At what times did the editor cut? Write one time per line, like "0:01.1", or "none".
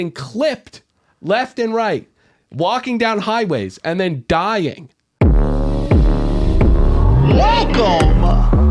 0:05.0